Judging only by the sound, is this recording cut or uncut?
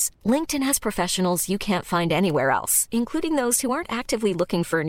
uncut